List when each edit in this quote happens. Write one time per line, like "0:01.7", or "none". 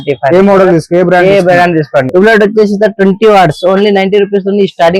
0:02.1